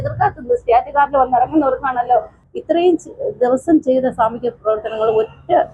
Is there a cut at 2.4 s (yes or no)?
yes